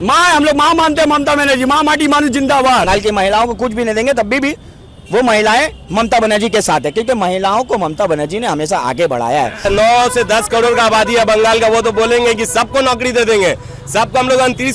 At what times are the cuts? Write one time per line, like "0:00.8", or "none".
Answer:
0:02.9
0:09.6

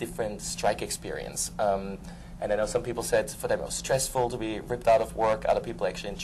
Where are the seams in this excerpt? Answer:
0:02.8

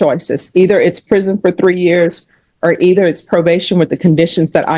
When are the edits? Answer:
none

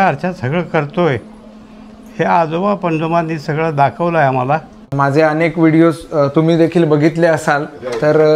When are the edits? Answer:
0:04.9

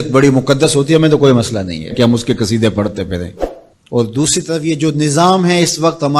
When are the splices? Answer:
0:03.4

